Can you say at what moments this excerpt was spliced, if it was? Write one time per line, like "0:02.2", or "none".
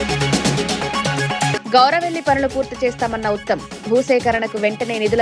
none